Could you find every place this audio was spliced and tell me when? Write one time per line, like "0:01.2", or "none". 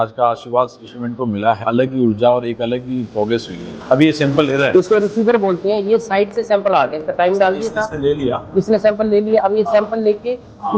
0:01.6
0:03.7